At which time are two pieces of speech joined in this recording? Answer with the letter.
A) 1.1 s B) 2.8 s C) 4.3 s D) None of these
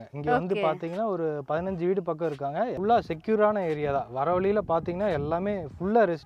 B